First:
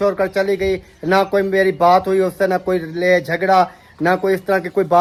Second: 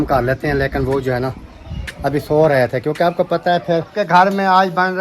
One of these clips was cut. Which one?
second; 1 cut; at 3.9 s

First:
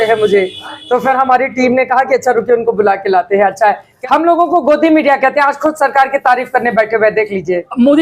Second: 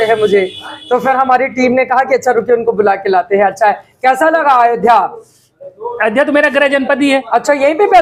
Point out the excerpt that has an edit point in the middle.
first; 1 cut; at 3.9 s

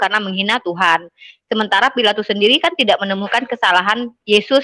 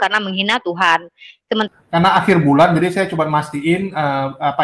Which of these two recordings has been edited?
second; 1 cut; at 1.7 s

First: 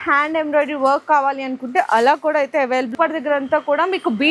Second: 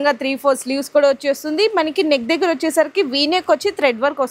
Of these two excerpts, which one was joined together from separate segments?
first; 1 cut; at 2.9 s

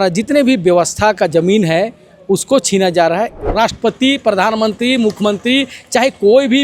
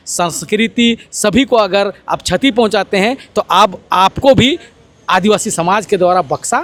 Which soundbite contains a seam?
first; 1 cut; at 3.4 s

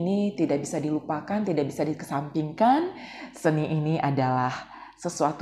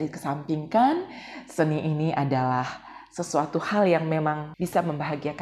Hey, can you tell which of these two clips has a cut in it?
second; 1 cut; at 4.5 s

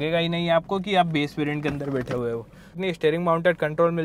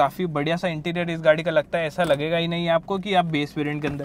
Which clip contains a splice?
first; 1 cut; at 2.8 s

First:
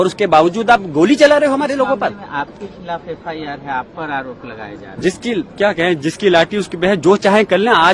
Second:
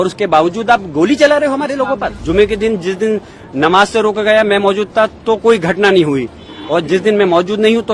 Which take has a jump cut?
second; 1 cut; at 2.2 s

